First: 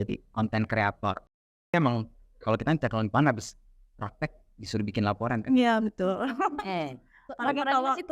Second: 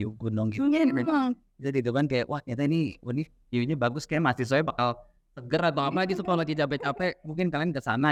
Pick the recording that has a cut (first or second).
first